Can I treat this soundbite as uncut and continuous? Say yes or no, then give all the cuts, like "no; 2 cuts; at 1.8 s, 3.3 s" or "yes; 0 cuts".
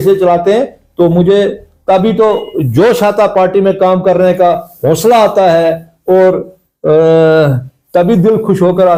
yes; 0 cuts